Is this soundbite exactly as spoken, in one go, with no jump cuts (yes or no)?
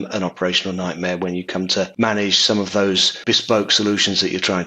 no